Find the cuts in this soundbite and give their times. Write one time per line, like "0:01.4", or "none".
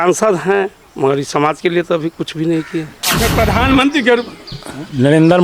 0:03.1